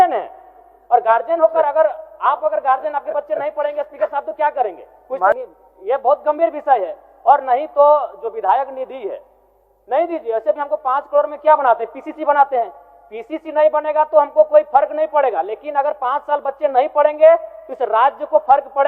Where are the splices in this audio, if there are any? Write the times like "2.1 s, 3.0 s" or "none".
5.4 s